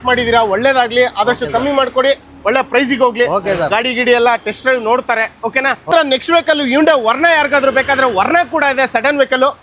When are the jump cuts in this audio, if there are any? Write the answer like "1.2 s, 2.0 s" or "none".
none